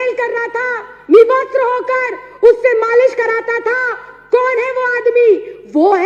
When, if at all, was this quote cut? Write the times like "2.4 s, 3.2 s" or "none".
none